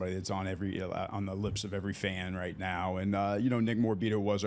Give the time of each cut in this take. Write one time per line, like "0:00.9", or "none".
none